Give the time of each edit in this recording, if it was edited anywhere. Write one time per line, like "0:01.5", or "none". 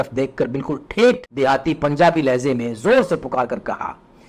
0:01.3